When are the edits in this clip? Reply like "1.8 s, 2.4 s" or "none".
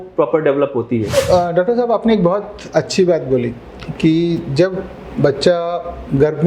1.1 s